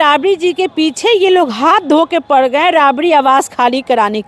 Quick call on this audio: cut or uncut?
uncut